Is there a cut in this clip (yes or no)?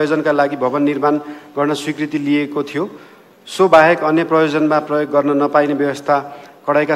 no